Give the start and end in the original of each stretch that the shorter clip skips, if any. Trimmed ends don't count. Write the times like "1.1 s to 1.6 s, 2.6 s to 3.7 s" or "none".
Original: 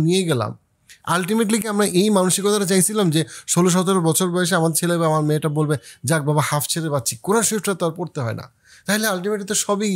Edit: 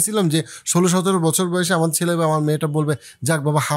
none